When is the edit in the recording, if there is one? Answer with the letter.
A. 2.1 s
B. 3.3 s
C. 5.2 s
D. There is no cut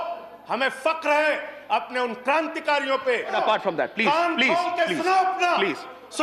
B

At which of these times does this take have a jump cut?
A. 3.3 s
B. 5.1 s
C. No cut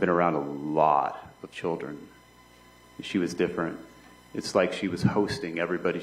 A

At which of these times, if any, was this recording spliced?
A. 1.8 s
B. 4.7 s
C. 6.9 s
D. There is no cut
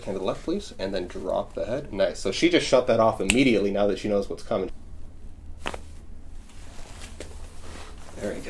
B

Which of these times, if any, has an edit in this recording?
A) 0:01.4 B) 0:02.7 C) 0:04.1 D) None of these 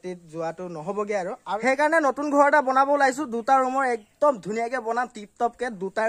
A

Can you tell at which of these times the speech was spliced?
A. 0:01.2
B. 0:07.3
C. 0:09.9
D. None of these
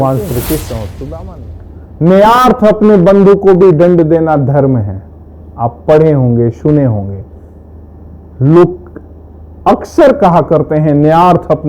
A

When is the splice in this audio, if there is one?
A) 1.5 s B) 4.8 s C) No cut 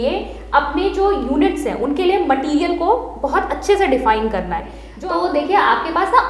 B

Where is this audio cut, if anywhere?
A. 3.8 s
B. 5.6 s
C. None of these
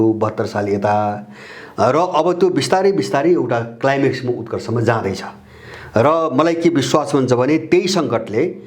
C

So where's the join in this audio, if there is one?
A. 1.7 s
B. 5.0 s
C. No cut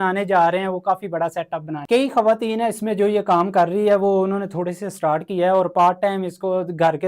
A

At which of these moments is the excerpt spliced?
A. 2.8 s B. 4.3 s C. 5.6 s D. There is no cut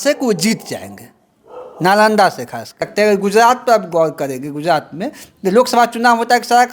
A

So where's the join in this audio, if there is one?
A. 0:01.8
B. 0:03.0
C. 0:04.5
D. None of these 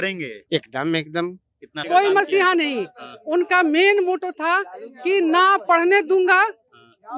A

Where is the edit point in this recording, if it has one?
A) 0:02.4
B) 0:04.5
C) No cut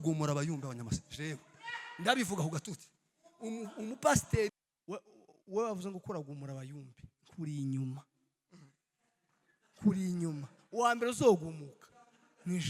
B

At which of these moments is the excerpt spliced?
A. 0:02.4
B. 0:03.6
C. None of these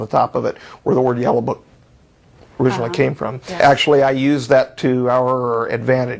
B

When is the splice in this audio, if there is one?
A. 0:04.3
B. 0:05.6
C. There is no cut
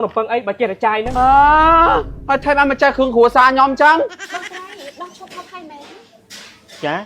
A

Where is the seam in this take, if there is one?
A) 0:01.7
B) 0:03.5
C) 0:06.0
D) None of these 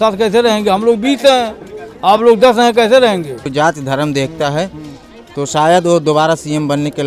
B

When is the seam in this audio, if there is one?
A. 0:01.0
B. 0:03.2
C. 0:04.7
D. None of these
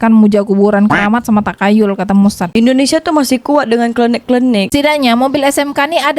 C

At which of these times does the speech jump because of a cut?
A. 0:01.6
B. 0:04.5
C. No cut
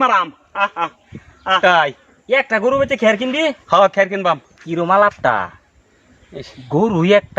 A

